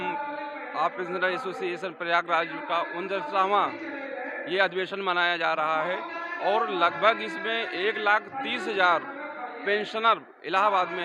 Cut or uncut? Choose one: uncut